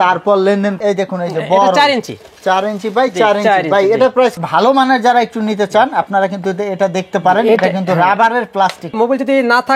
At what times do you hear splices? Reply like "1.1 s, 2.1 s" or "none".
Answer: 0.8 s, 4.4 s, 9.0 s